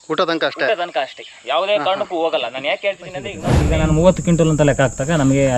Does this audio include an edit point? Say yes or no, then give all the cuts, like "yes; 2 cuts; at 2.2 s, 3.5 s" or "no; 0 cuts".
yes; 1 cut; at 3.5 s